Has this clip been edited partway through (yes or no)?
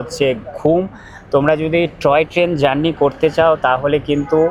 no